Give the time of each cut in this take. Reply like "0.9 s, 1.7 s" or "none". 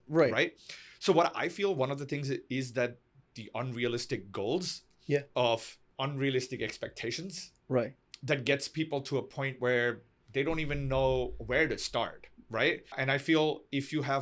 13.0 s